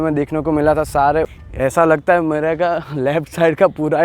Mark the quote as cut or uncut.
cut